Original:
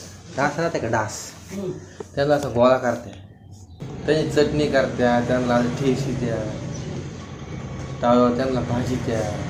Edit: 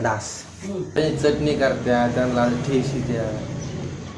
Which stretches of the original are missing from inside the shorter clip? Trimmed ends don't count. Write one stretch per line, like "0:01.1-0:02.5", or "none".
0:01.8-0:04.0

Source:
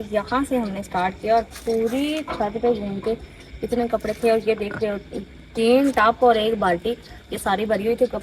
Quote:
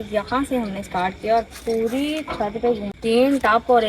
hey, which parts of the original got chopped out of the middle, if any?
0:02.9-0:05.4

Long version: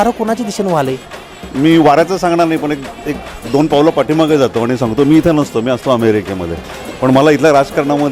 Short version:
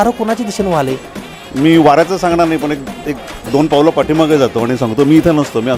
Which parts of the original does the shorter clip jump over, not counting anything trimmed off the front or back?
none

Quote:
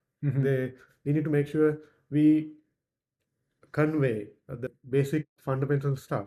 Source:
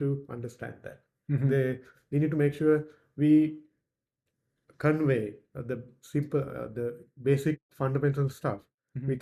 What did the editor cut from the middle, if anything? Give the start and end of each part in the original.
0:05.8-0:07.1

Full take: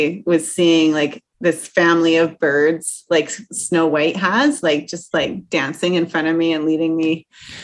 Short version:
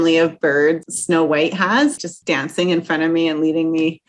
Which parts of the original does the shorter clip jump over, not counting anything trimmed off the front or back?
0:02.9-0:03.5
0:04.6-0:05.2

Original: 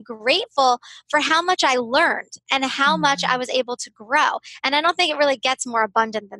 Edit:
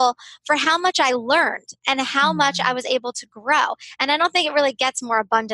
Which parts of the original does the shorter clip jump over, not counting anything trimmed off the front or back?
none

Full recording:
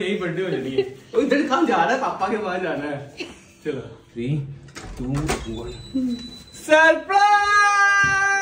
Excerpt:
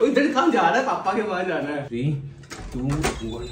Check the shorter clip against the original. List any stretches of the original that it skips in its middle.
0:03.0-0:04.1

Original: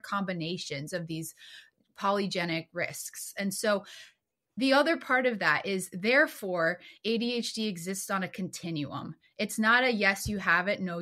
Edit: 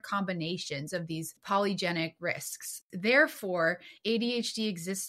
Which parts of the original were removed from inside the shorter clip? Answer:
0:01.3-0:01.9
0:03.4-0:05.8

